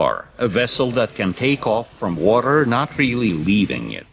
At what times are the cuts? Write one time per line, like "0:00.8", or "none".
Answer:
0:00.9

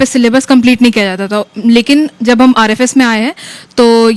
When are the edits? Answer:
none

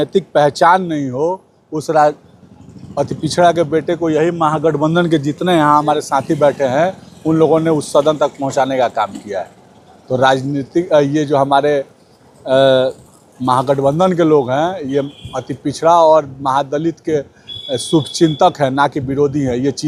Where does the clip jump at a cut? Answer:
none

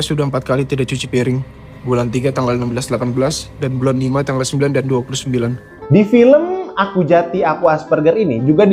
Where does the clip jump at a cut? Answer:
0:05.7

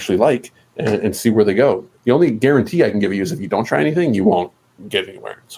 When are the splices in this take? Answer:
0:01.9

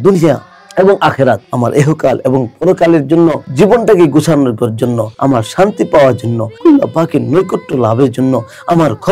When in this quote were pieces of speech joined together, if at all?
0:01.5
0:03.4
0:05.1
0:06.5

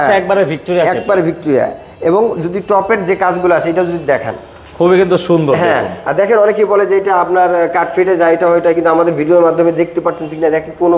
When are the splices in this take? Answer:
none

